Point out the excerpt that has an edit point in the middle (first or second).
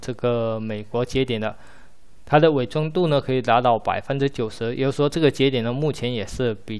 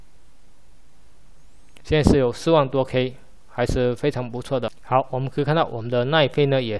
second